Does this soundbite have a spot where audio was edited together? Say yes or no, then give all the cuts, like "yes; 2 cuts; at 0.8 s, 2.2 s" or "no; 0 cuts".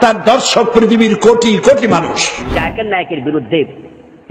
yes; 1 cut; at 2.5 s